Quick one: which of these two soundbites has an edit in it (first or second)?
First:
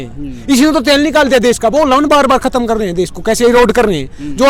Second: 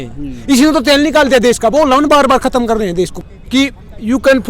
second